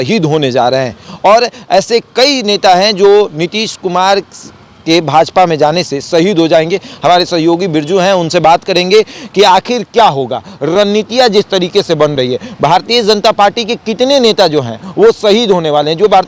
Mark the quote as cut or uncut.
uncut